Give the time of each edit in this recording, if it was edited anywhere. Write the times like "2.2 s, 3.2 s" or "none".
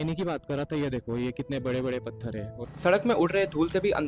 2.6 s

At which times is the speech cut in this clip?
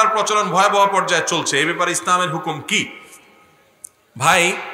none

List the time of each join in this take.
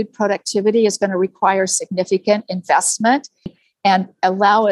3.6 s

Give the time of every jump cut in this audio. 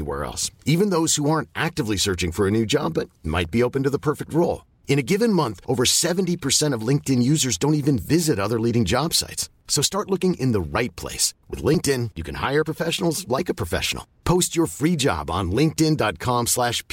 none

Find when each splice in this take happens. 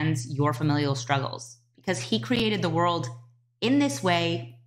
none

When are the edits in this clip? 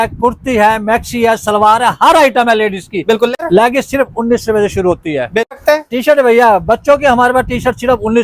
3.4 s, 5.5 s

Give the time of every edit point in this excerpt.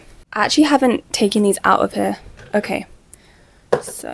none

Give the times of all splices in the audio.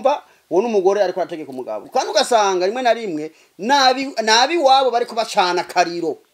1.9 s

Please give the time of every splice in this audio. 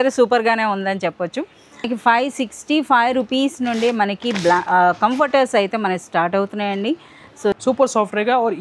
1.9 s, 7.6 s

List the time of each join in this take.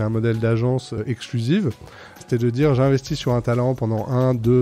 1.0 s, 2.2 s

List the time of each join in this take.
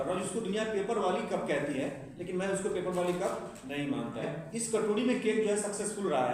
4.3 s

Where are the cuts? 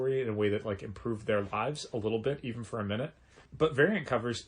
3.5 s

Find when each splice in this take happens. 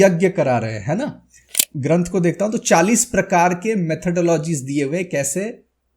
1.6 s

